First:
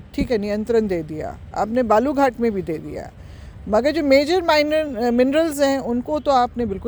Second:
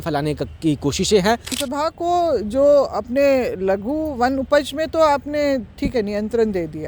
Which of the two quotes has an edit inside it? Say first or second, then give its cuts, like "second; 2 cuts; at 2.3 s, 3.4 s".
second; 1 cut; at 1.6 s